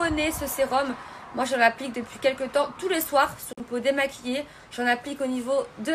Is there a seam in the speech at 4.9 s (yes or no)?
no